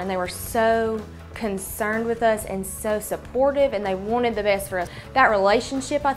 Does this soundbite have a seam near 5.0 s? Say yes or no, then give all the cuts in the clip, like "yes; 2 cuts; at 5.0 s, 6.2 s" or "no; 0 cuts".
yes; 1 cut; at 5.0 s